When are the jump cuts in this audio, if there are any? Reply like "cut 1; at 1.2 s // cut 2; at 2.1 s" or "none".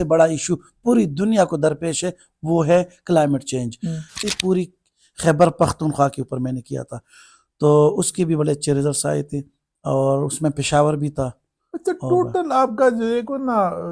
cut 1; at 4.1 s